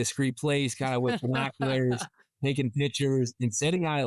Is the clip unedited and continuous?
yes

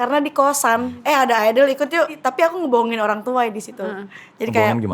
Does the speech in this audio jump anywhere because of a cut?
yes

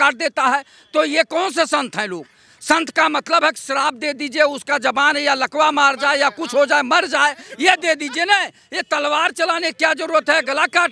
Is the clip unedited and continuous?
yes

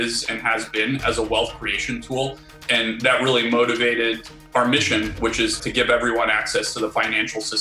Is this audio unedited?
no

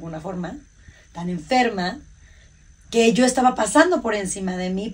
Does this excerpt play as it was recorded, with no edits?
yes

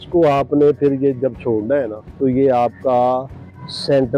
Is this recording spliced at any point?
yes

